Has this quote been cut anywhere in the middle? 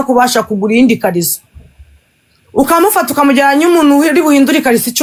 no; 0 cuts

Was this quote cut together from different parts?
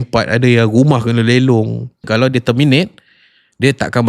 yes; 1 cut; at 2.1 s

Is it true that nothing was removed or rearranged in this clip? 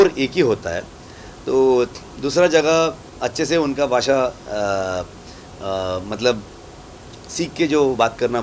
yes; 0 cuts

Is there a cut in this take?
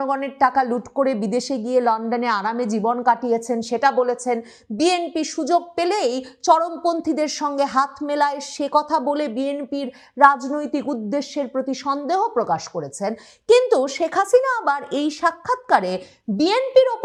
no; 0 cuts

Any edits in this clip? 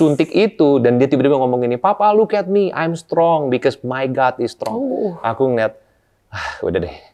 no; 0 cuts

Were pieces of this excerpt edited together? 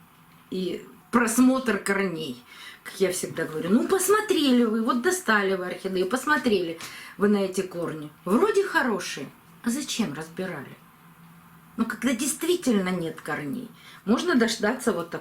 yes; 1 cut; at 0.9 s

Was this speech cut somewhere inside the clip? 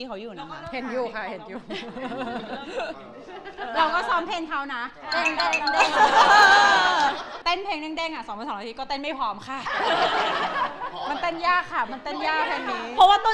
yes; 1 cut; at 7.3 s

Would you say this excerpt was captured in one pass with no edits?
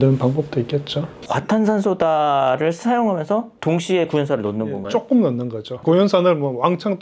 yes; 0 cuts

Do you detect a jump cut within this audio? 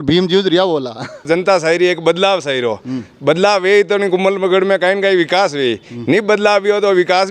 yes; 1 cut; at 1.3 s

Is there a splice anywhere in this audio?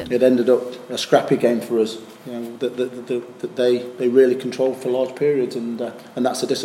no; 0 cuts

